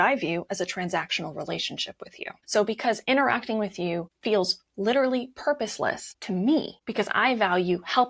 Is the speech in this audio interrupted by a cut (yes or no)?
yes